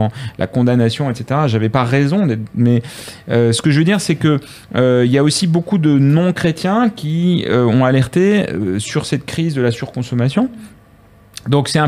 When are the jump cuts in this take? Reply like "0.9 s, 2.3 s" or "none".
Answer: none